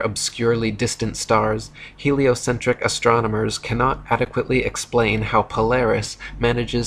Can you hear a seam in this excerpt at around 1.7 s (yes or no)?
no